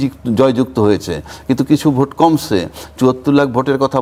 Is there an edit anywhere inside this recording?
no; 0 cuts

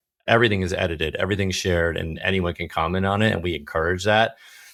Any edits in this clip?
no; 0 cuts

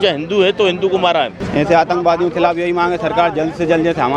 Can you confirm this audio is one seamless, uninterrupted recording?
no; 1 cut; at 1.4 s

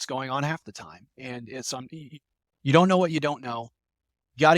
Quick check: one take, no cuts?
yes; 0 cuts

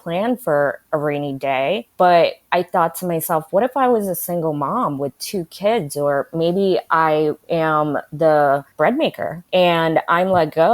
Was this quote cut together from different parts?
yes; 3 cuts; at 1.9 s, 7.4 s, 9.1 s

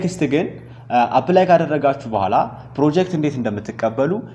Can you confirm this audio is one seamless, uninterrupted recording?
yes; 0 cuts

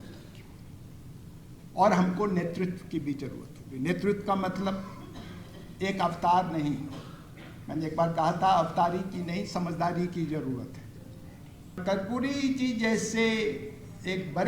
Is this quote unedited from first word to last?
no; 1 cut; at 11.8 s

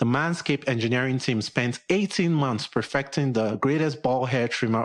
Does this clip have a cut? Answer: no; 0 cuts

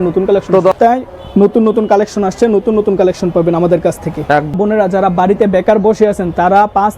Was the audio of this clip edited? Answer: yes; 2 cuts; at 0.8 s, 4.5 s

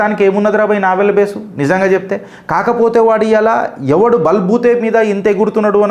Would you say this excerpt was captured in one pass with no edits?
yes; 0 cuts

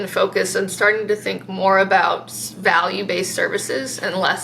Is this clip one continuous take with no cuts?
yes; 0 cuts

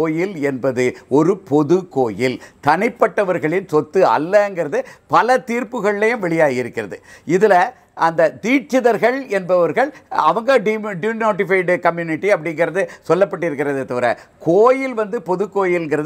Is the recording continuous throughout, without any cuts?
yes; 0 cuts

